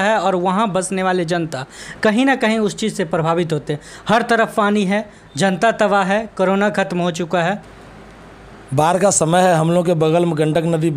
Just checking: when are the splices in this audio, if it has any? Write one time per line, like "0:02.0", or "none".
0:07.8

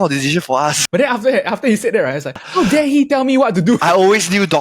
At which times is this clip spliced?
0:00.8
0:02.4
0:03.8

